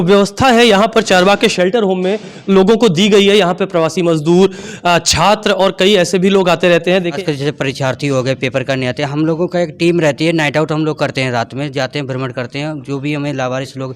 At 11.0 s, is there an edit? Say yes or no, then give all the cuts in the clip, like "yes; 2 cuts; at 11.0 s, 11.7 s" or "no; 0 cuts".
no; 1 cut; at 7.2 s